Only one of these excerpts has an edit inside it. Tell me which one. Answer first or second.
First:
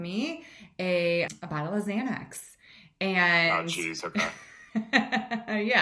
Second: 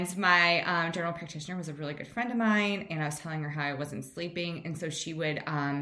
first